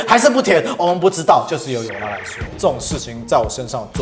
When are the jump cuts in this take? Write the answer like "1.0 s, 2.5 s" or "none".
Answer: 2.3 s